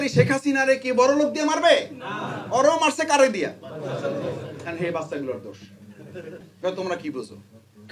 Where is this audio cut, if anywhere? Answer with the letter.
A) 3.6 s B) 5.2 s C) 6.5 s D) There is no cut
C